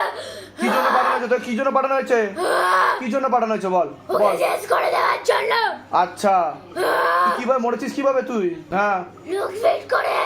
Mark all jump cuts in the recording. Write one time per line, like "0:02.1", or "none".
0:08.7